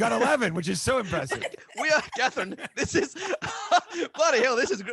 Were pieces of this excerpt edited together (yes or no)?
no